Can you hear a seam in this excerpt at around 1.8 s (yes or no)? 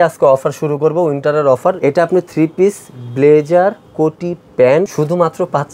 yes